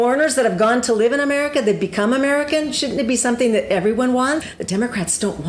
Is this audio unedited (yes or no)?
no